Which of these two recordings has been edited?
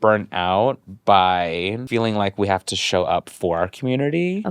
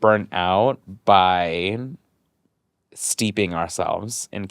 first; 1 cut; at 1.8 s

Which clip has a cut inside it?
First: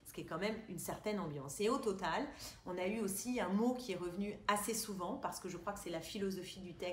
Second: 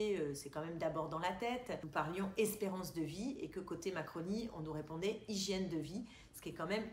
second; 1 cut; at 1.9 s

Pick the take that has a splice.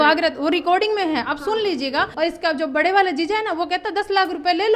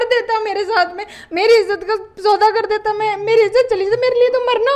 first; 1 cut; at 2.1 s

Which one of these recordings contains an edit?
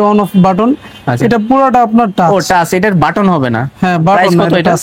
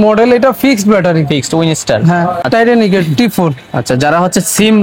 second; 1 cut; at 2.4 s

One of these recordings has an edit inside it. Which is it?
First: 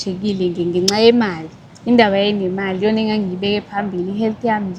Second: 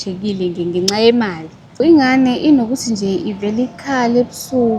second; 1 cut; at 1.8 s

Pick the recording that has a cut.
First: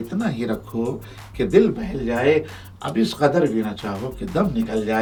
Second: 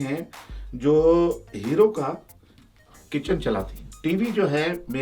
second; 1 cut; at 3.8 s

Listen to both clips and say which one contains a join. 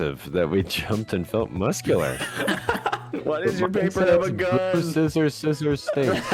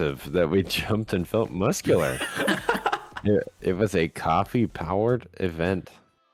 first; 1 cut; at 3.1 s

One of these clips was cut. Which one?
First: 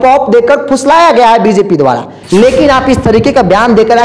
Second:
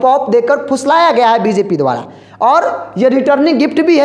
first; 1 cut; at 2.1 s

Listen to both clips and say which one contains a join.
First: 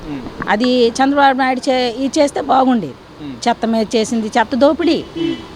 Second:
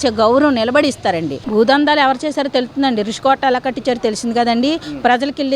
second; 1 cut; at 1.4 s

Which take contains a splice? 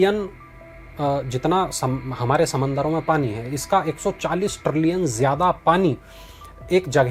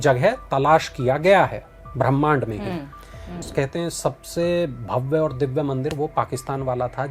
second; 1 cut; at 3.4 s

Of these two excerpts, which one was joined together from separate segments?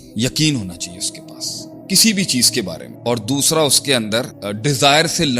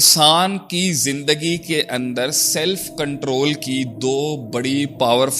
first; 2 cuts; at 2.8 s, 4.4 s

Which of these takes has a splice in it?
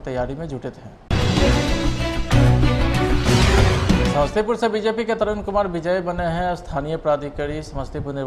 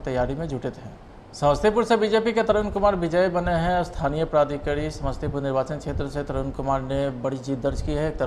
second; 1 cut; at 1.3 s

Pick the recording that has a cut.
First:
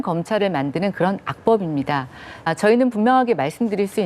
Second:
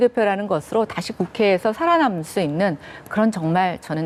first; 1 cut; at 2.5 s

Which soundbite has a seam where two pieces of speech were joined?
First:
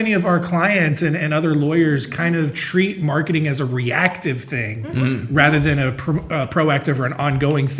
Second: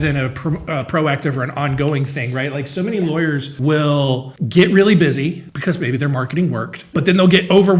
second; 4 cuts; at 3.5 s, 4.3 s, 5.5 s, 6.7 s

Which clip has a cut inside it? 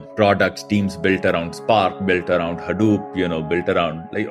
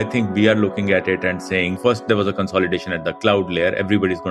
second; 1 cut; at 1.7 s

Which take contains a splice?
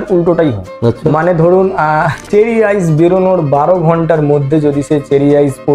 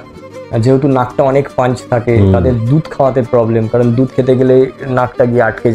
first; 1 cut; at 2.2 s

